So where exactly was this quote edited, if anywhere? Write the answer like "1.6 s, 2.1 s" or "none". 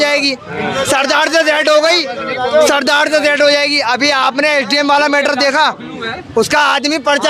none